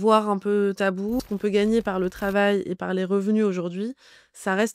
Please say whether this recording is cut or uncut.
cut